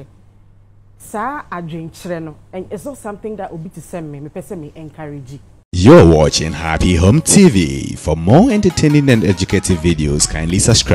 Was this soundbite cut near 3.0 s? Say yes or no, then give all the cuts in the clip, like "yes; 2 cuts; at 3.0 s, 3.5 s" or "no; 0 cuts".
no; 1 cut; at 5.6 s